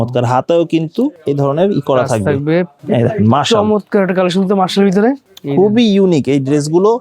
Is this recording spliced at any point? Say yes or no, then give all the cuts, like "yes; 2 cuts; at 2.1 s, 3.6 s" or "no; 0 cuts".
yes; 3 cuts; at 1.2 s, 2.7 s, 5.3 s